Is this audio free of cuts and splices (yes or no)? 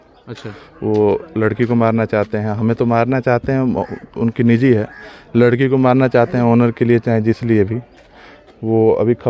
yes